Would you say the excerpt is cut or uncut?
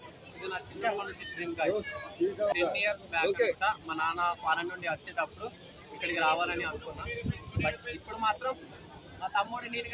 cut